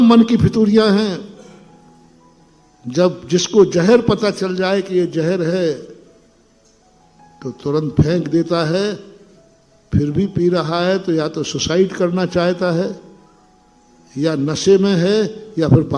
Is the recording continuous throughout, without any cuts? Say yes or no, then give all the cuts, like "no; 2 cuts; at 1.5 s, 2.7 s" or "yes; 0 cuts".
yes; 0 cuts